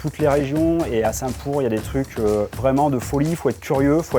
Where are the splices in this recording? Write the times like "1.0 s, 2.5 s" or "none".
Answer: none